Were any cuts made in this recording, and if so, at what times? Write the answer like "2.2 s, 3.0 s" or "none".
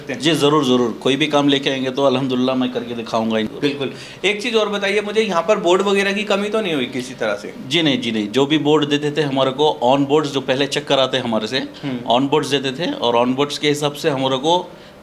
3.5 s